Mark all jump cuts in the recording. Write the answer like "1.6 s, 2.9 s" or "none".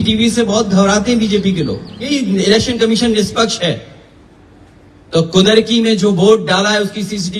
2.1 s